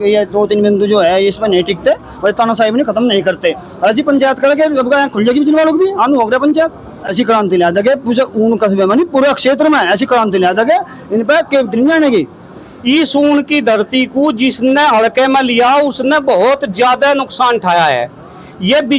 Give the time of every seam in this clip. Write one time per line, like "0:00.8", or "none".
0:07.0
0:12.7

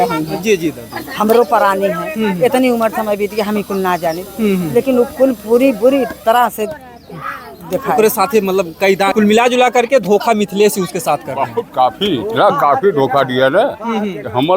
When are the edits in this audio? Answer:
0:09.1

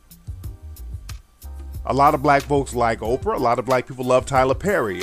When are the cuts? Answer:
0:03.6

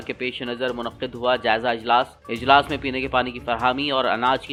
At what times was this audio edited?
none

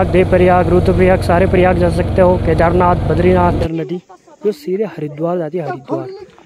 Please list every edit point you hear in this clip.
0:03.6

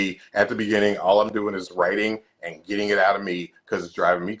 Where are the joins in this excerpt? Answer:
none

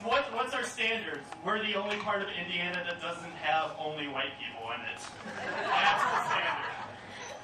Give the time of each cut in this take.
none

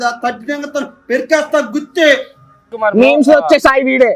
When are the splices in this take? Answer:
0:02.7

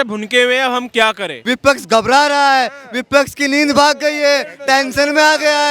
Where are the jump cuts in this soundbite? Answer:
0:01.3

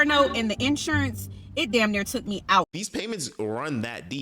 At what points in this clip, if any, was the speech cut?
0:02.8

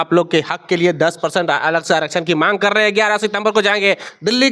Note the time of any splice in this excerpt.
none

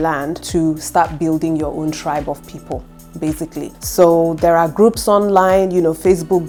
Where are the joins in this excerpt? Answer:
none

